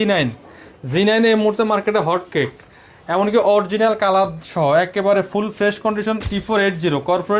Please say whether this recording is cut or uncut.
cut